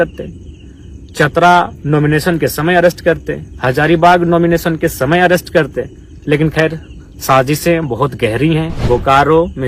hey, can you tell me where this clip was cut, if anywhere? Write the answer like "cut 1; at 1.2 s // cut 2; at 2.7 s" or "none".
cut 1; at 8.7 s